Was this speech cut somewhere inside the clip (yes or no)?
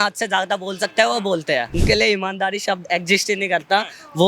yes